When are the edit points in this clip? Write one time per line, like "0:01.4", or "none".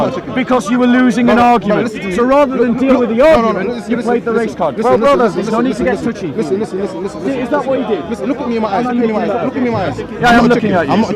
none